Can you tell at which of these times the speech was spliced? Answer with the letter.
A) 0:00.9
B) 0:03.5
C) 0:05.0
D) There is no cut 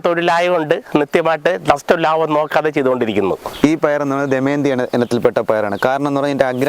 B